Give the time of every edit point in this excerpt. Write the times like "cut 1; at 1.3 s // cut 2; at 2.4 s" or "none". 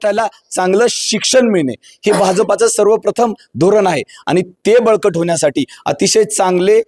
none